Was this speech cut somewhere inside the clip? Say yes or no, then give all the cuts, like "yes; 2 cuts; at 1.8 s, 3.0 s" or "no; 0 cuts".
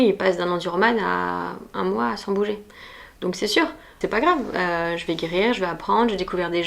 yes; 1 cut; at 4.0 s